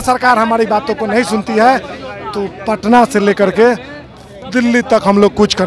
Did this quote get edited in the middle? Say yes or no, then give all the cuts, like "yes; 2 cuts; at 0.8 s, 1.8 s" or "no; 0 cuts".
no; 0 cuts